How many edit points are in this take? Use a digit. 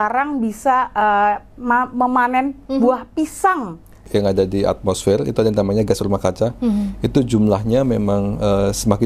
1